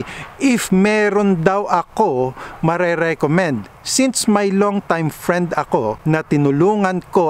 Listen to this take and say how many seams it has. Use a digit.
1